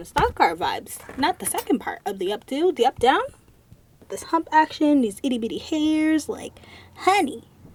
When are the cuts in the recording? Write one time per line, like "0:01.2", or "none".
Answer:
none

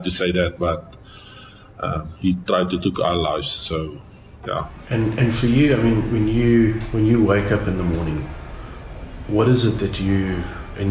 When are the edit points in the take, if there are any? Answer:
0:04.8

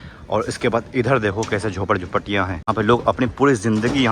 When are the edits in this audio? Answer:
0:02.7

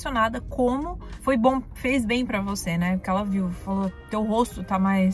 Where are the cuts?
none

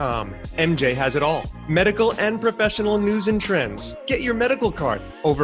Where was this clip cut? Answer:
none

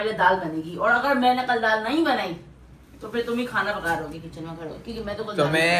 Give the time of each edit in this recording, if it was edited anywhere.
none

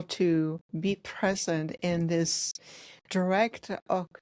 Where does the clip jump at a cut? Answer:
none

